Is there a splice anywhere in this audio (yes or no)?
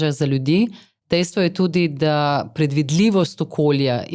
no